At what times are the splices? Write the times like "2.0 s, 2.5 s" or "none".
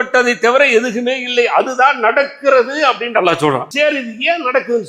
3.7 s